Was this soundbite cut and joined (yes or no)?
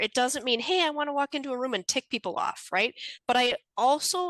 yes